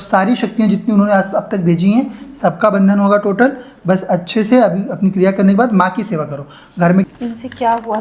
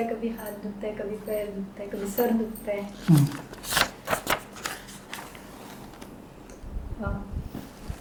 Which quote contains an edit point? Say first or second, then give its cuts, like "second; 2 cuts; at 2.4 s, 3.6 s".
first; 1 cut; at 7.0 s